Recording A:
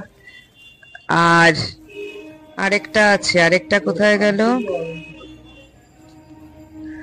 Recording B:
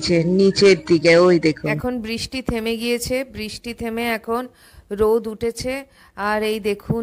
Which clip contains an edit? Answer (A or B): B